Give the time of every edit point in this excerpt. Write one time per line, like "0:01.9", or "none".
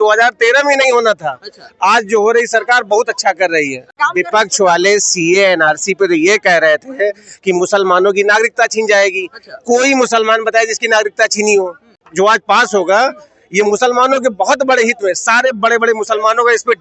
0:04.0
0:12.0